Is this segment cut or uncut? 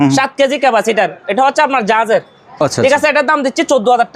uncut